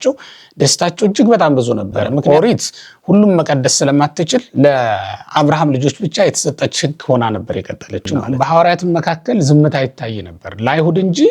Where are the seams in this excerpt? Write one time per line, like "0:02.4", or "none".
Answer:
0:02.2
0:08.3